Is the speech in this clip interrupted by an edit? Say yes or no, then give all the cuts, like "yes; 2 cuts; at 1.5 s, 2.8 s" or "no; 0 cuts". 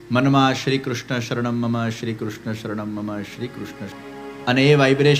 yes; 1 cut; at 3.9 s